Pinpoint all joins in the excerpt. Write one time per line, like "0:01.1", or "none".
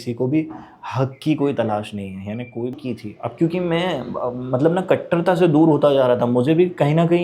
0:02.8

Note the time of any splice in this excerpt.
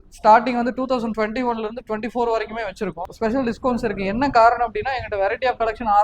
0:03.0

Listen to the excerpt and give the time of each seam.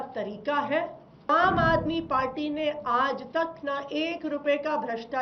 0:01.3

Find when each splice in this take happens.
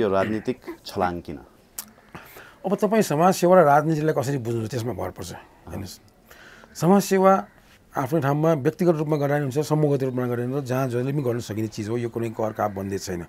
none

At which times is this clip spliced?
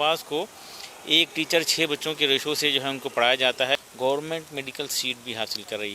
0:03.9

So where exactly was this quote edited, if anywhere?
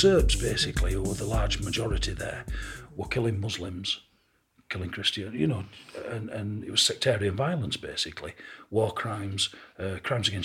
none

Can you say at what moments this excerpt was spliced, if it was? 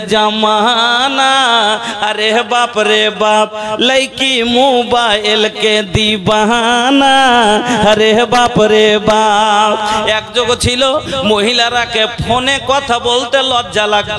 none

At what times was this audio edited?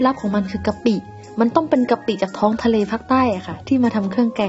none

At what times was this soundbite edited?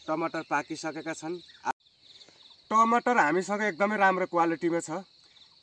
0:02.1

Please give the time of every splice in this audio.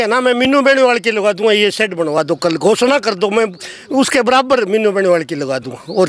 none

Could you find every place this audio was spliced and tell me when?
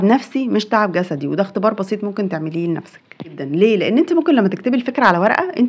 0:03.4

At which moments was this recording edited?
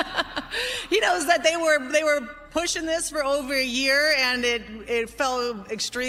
none

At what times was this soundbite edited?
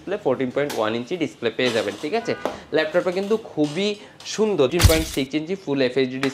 0:04.7

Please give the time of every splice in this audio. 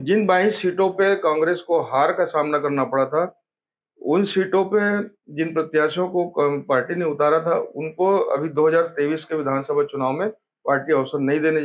none

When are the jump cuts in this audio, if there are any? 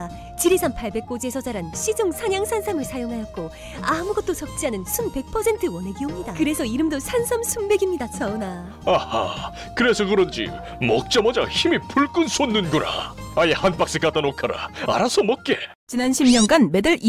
0:15.8

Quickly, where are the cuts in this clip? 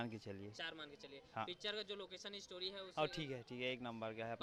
none

